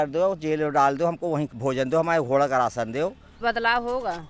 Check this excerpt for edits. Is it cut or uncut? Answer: cut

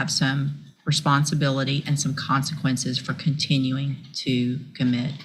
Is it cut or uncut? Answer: uncut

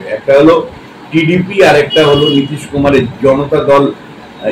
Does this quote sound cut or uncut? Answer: uncut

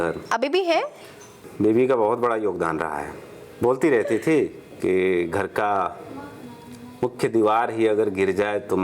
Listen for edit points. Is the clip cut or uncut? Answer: cut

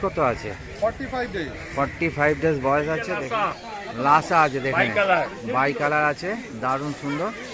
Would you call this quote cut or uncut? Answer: cut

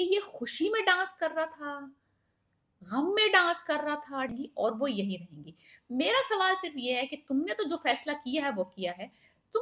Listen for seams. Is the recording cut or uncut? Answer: cut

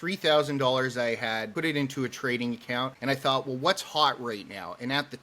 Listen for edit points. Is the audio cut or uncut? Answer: cut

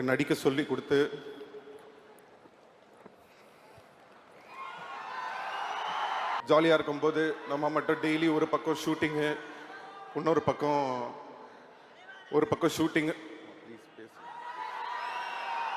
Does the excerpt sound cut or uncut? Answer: cut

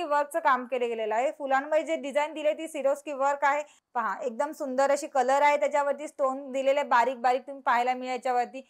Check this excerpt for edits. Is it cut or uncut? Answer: cut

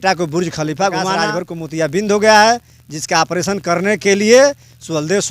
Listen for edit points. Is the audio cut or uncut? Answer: cut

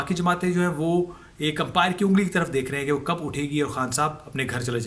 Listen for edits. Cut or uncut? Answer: uncut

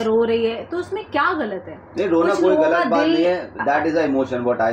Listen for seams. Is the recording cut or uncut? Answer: uncut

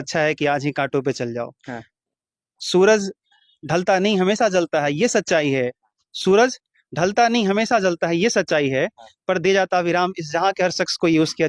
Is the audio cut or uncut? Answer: uncut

